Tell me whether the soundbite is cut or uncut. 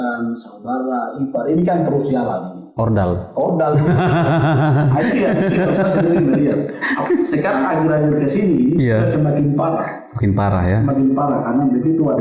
uncut